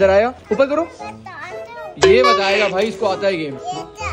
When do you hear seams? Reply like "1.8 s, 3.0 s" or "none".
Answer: none